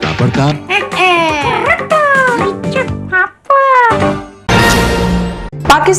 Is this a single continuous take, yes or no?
no